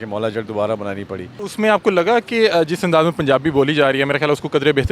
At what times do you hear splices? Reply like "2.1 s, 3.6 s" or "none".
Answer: 1.3 s